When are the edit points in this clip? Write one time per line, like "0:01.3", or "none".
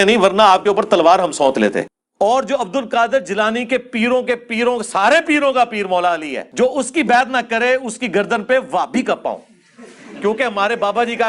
0:01.8